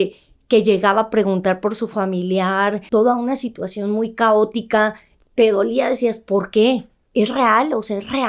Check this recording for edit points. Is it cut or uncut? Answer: cut